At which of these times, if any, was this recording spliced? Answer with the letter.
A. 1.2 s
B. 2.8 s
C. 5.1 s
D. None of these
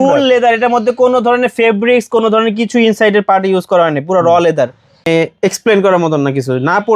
C